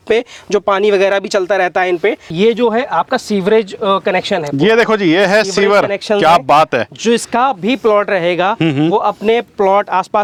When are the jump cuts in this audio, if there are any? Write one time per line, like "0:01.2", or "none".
none